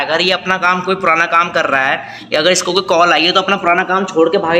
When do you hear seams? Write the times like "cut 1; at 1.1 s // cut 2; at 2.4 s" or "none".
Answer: none